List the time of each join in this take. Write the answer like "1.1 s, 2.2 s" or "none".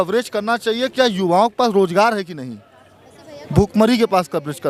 none